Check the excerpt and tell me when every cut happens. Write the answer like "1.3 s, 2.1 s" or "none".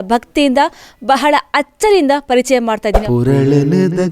2.9 s